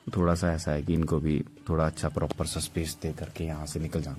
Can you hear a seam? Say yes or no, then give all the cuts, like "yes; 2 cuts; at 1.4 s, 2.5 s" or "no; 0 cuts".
no; 0 cuts